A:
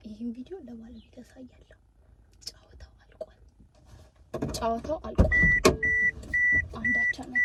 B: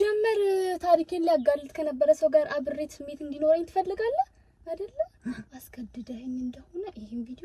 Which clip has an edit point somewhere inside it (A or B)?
B